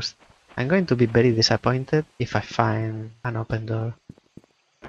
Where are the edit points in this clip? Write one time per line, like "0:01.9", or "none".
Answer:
0:02.1
0:03.1

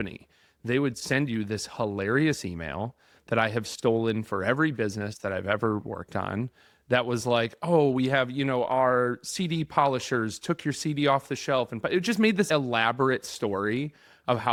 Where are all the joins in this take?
none

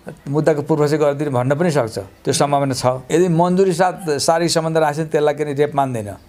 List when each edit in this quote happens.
0:03.0

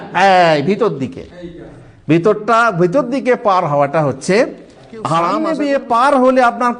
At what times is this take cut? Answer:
0:05.4

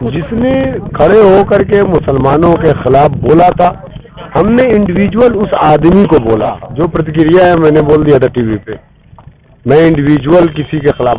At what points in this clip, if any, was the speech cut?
0:06.6

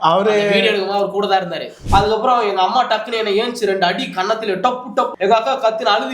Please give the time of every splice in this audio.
0:01.7
0:05.1

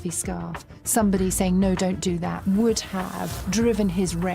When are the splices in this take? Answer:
0:02.3
0:03.4

